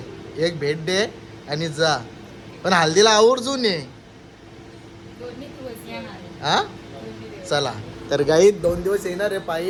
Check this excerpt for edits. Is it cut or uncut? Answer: uncut